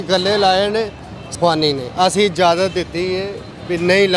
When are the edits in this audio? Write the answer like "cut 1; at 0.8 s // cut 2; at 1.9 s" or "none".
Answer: cut 1; at 1.2 s